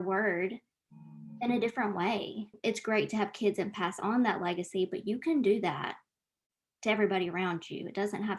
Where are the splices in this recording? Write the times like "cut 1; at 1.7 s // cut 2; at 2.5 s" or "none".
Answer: cut 1; at 2.6 s